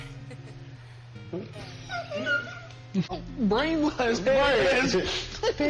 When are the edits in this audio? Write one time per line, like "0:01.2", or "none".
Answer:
0:03.1

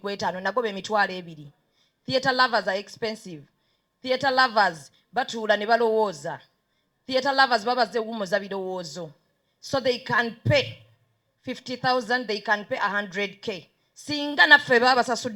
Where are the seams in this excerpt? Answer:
none

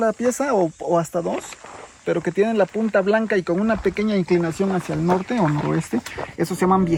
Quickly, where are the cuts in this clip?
none

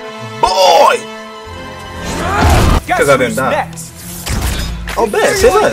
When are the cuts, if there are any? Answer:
0:02.8

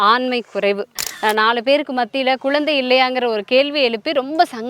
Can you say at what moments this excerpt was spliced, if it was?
0:01.1

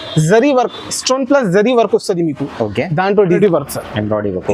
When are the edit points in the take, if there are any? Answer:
0:03.4

